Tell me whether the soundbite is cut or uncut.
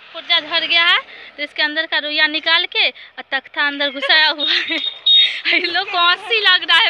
uncut